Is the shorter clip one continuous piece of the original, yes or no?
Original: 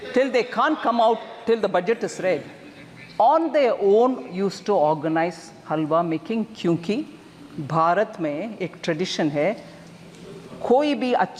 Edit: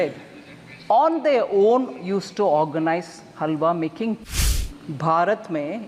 no